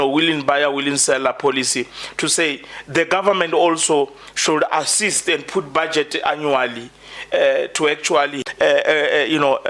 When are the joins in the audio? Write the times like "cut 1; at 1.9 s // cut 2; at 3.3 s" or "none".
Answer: cut 1; at 8.4 s